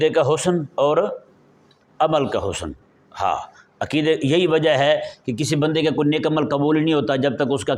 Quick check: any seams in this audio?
no; 0 cuts

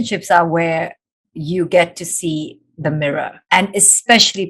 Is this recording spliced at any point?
yes; 1 cut; at 3.4 s

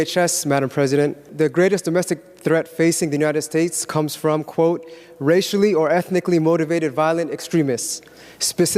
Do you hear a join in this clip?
yes; 1 cut; at 1.2 s

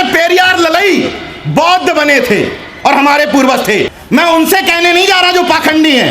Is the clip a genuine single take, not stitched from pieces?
no; 1 cut; at 3.9 s

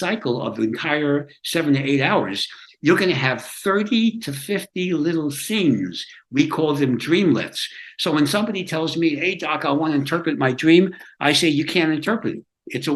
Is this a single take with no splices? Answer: yes; 0 cuts

